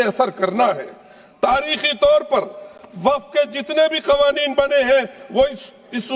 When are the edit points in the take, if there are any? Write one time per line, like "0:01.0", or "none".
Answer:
none